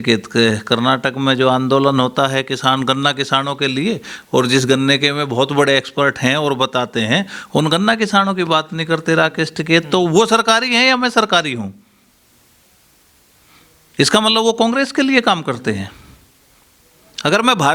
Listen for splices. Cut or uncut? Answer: uncut